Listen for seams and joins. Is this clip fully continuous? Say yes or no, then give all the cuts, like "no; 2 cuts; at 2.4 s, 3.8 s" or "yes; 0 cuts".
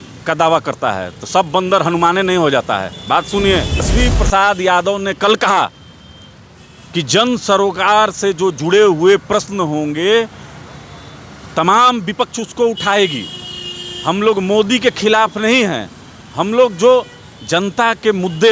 no; 1 cut; at 3.9 s